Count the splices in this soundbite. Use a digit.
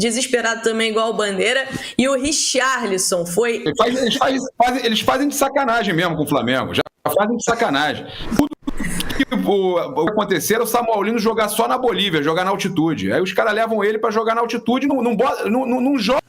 1